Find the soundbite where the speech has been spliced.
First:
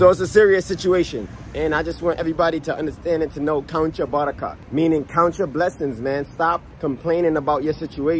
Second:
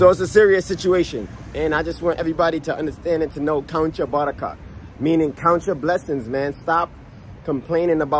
first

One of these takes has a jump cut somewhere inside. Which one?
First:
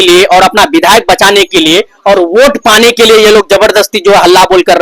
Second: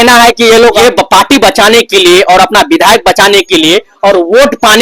second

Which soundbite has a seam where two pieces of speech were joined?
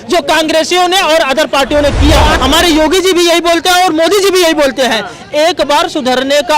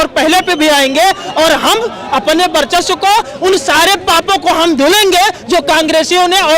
first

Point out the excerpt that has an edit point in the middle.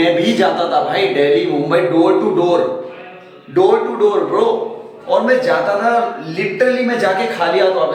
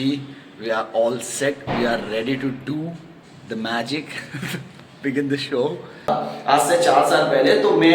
second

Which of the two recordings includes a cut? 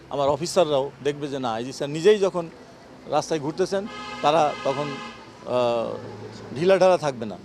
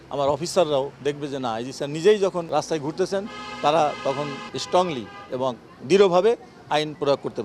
second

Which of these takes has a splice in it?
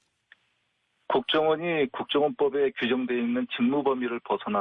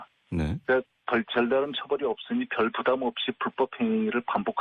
second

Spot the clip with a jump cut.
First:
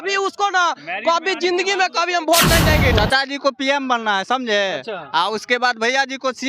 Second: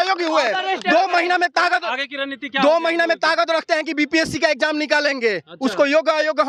first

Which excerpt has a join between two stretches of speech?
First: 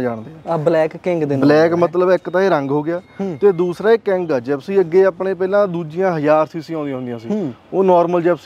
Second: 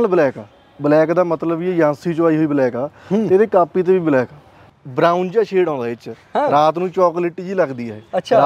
second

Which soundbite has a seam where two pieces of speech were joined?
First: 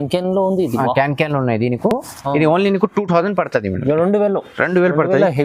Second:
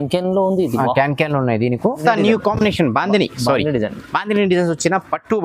second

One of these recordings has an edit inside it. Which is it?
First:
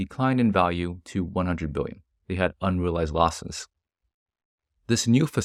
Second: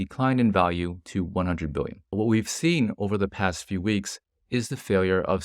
second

